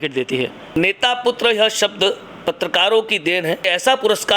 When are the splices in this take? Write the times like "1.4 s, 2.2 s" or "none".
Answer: 0.8 s, 2.3 s, 3.6 s